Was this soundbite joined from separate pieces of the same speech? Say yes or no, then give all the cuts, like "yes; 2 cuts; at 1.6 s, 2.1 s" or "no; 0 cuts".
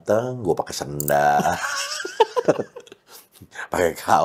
no; 0 cuts